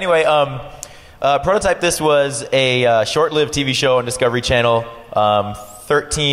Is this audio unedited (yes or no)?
yes